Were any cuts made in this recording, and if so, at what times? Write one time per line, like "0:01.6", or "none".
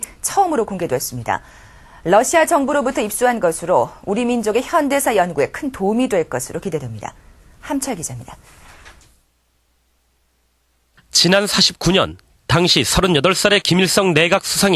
0:12.2